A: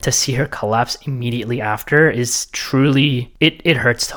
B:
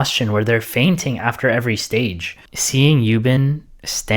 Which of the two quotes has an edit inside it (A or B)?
B